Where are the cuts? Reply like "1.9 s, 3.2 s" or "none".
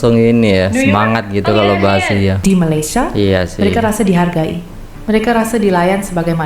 2.4 s